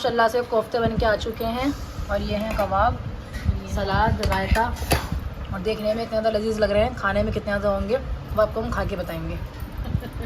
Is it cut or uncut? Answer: uncut